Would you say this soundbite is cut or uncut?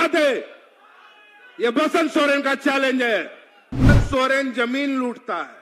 cut